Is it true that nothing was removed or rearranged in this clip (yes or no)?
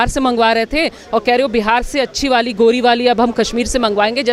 yes